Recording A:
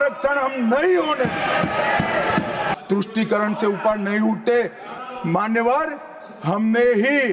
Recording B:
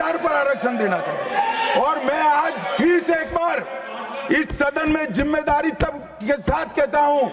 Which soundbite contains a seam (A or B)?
A